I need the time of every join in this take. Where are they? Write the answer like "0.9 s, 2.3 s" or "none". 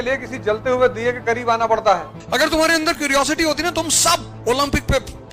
2.1 s